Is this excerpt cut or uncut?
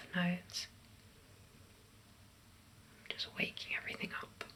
uncut